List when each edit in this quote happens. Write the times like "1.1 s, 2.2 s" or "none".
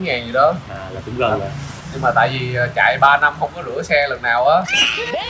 none